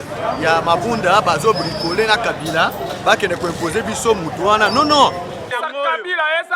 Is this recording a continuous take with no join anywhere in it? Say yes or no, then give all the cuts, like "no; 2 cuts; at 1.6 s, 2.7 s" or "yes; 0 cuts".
no; 1 cut; at 5.5 s